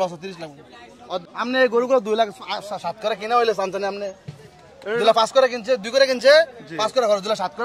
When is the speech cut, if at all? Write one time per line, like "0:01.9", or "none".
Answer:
0:01.2